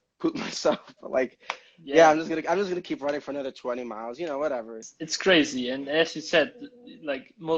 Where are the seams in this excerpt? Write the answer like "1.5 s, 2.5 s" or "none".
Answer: 4.8 s